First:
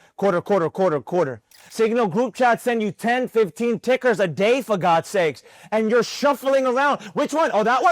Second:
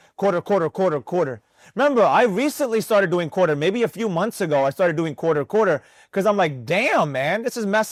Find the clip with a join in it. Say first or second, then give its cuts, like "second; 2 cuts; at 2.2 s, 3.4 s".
first; 1 cut; at 1.6 s